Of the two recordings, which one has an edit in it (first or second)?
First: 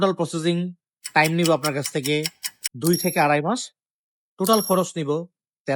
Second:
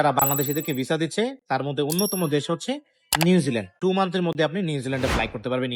second